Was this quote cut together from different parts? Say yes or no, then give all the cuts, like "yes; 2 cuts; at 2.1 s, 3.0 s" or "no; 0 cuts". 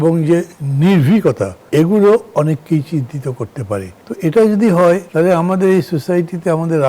no; 0 cuts